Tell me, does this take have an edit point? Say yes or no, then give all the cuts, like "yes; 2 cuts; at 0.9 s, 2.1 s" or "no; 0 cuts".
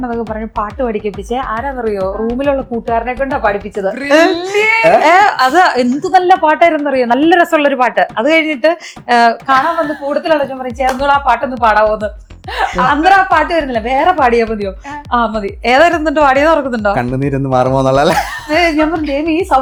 no; 0 cuts